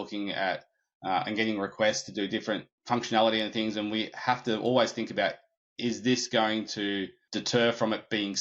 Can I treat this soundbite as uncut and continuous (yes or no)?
no